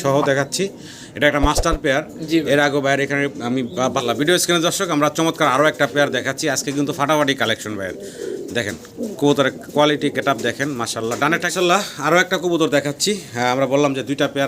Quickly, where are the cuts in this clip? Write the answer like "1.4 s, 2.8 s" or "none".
4.0 s, 11.5 s